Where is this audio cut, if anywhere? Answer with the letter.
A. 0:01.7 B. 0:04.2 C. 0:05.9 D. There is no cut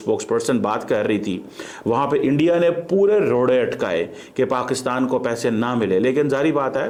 D